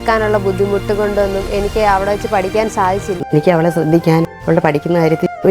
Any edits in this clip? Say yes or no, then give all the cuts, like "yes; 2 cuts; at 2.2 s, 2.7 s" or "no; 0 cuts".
yes; 1 cut; at 3.2 s